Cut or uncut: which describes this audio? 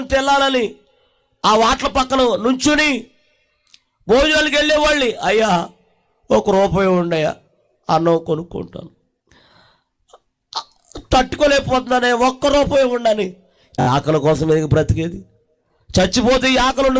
cut